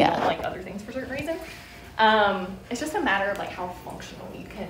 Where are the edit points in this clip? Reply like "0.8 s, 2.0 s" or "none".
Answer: none